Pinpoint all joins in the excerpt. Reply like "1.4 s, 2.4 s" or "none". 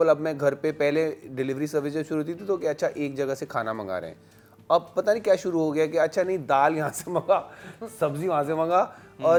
none